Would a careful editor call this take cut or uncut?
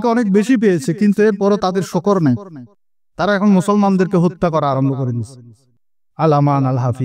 uncut